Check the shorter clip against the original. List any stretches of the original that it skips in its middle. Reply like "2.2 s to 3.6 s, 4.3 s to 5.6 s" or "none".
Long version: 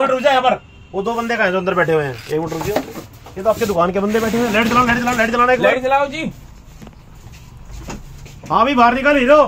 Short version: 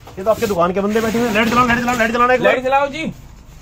none